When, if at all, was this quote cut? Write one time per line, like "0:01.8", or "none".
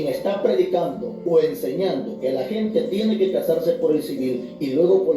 none